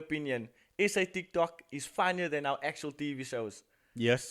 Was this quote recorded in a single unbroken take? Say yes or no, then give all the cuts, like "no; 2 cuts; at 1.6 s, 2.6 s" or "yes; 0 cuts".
yes; 0 cuts